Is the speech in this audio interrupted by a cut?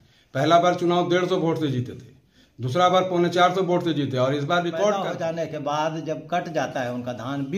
yes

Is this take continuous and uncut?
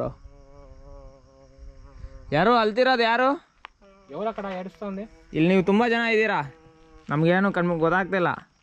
yes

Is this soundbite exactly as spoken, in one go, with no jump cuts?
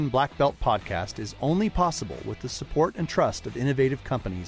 yes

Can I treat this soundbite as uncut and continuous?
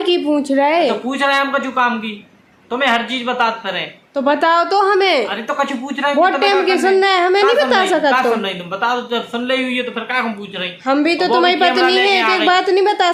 yes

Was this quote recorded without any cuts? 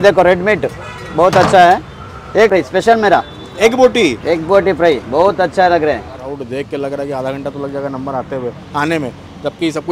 no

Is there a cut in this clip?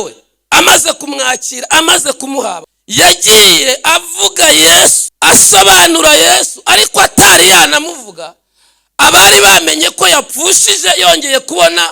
yes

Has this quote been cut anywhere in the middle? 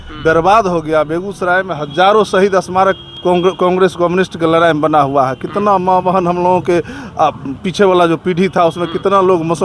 no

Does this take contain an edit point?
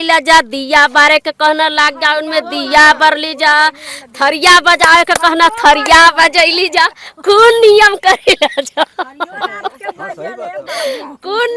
no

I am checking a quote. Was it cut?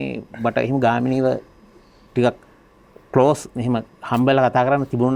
no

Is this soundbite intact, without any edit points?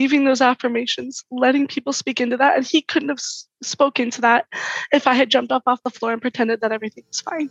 no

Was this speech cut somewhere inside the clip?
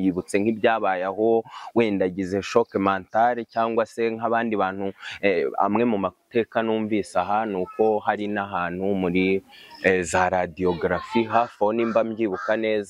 no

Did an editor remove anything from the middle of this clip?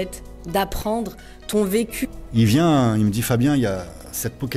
yes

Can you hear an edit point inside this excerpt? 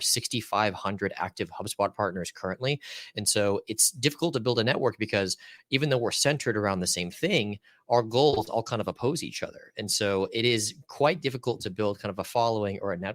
no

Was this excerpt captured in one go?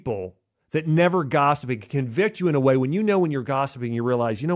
yes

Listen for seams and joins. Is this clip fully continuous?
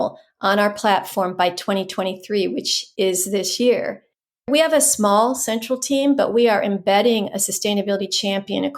no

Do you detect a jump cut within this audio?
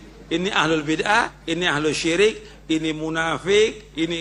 yes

